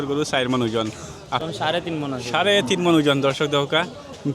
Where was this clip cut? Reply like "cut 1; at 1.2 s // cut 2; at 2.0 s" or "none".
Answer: cut 1; at 1.4 s